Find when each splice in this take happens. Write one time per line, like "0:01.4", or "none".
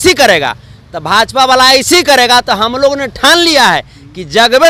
none